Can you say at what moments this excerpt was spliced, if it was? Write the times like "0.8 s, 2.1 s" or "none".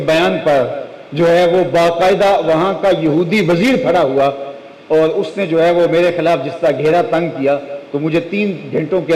none